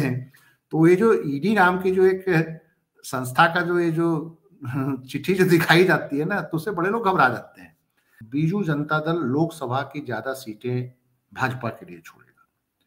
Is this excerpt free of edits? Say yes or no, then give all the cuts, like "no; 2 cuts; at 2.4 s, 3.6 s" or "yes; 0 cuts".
no; 1 cut; at 8.2 s